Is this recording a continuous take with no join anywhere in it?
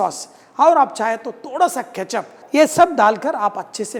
yes; 0 cuts

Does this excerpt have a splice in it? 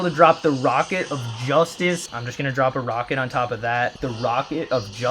yes; 2 cuts; at 2.1 s, 4.0 s

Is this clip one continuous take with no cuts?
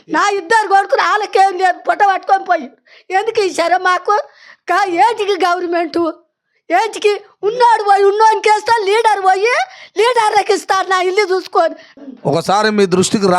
no; 1 cut; at 11.9 s

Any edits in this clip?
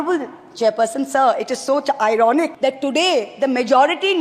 yes; 1 cut; at 2.1 s

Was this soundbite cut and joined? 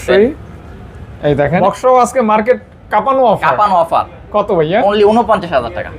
yes; 1 cut; at 1.6 s

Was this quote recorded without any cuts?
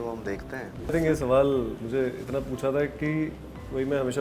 no; 1 cut; at 0.9 s

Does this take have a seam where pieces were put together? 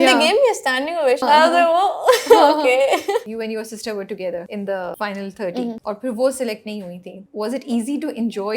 yes; 5 cuts; at 1.2 s, 3.3 s, 4.8 s, 5.8 s, 7.2 s

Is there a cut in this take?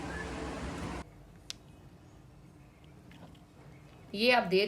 yes; 1 cut; at 1.0 s

